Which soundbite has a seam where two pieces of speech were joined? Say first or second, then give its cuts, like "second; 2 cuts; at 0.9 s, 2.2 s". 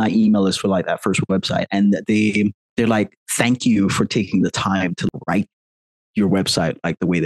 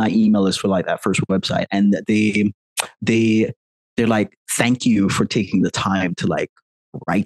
first; 2 cuts; at 2.6 s, 5.1 s